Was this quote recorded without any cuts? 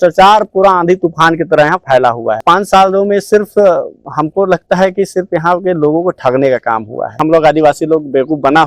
no; 2 cuts; at 2.4 s, 7.2 s

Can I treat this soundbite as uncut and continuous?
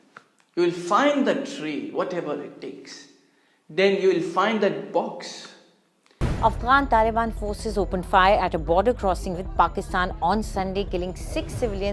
no; 1 cut; at 6.2 s

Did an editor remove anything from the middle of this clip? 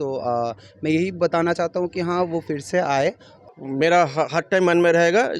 yes; 1 cut; at 3.3 s

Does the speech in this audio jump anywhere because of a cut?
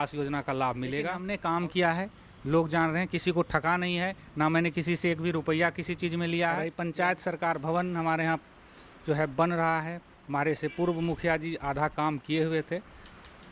yes; 2 cuts; at 1.3 s, 6.7 s

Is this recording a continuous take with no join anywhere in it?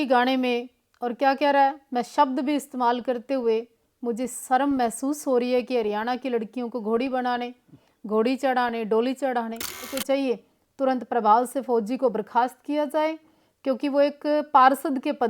no; 1 cut; at 9.9 s

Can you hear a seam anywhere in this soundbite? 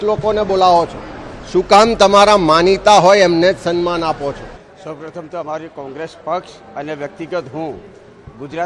yes; 1 cut; at 5.9 s

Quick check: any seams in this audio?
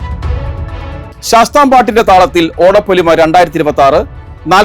yes; 1 cut; at 1.2 s

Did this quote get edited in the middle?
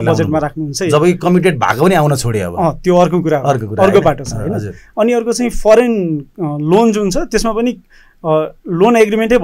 no; 0 cuts

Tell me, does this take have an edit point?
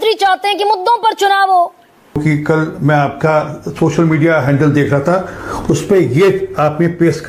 yes; 1 cut; at 2.2 s

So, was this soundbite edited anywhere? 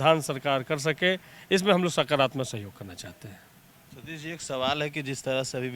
no; 0 cuts

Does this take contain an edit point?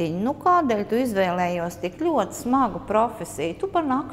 no; 0 cuts

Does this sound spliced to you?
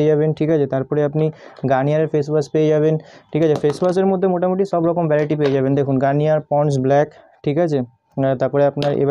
no; 0 cuts

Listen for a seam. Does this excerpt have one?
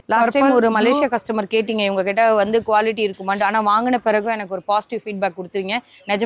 no; 0 cuts

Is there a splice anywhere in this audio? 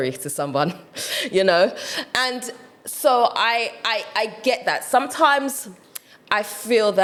no; 0 cuts

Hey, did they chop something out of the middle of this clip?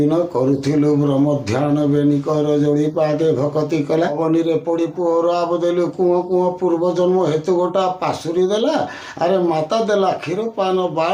yes; 1 cut; at 4.1 s

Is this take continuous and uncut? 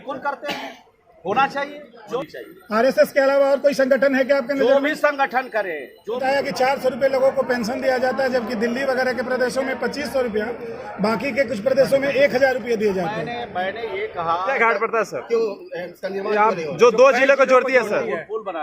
no; 3 cuts; at 2.2 s, 6.2 s, 14.6 s

